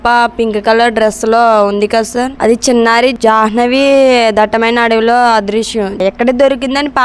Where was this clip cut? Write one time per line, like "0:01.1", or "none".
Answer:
0:02.3
0:03.2
0:06.0